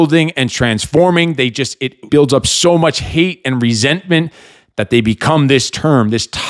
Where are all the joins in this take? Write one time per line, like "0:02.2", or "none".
0:02.0